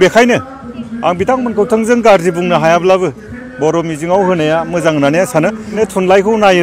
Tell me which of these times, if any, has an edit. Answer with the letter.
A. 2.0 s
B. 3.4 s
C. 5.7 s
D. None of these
C